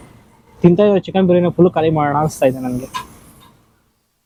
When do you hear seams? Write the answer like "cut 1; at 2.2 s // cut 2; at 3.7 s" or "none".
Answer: none